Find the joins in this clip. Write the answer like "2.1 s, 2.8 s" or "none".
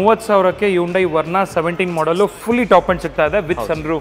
none